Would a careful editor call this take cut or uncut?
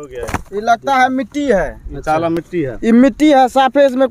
uncut